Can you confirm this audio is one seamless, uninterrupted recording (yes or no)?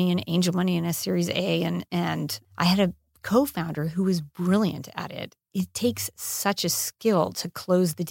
no